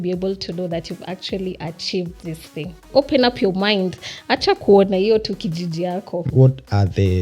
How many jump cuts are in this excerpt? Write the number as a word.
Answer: two